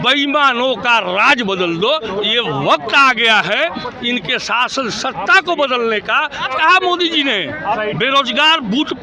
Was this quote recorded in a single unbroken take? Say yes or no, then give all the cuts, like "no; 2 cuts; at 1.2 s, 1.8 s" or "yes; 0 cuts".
no; 2 cuts; at 6.4 s, 7.8 s